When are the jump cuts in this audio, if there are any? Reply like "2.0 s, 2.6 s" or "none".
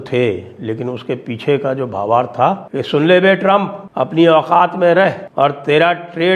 2.7 s, 3.8 s, 5.2 s